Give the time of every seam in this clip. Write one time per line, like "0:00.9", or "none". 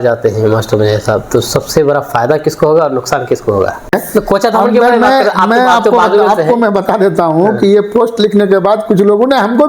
0:03.9